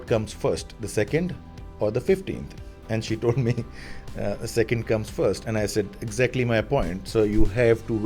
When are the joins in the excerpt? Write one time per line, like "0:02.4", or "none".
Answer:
none